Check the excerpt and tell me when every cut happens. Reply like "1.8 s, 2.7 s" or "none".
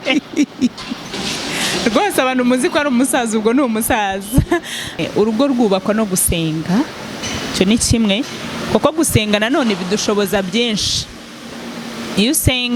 5.0 s